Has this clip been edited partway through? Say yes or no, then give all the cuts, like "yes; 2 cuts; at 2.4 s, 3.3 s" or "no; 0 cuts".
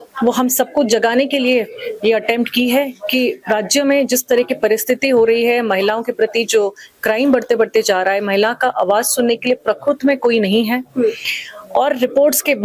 no; 0 cuts